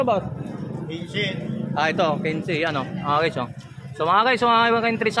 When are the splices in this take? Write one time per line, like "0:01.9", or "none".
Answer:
none

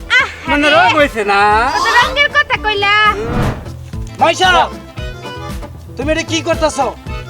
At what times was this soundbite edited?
0:03.4

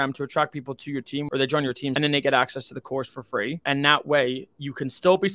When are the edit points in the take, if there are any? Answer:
0:01.6
0:03.6

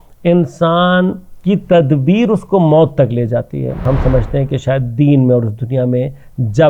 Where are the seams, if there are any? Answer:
0:03.8

